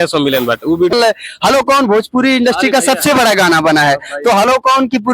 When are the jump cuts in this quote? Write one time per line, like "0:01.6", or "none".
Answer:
0:00.9